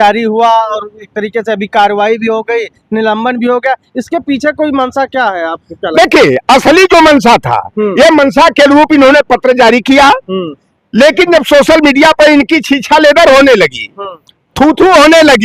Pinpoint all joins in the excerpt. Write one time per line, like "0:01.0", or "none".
none